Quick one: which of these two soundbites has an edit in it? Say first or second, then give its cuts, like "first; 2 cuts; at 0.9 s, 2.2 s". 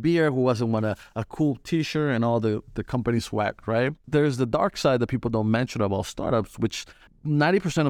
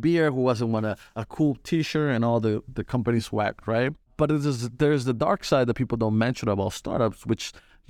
first; 2 cuts; at 4.0 s, 7.0 s